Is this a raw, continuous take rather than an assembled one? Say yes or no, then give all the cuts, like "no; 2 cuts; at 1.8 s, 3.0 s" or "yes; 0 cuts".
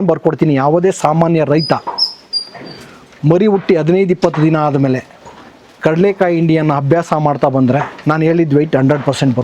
yes; 0 cuts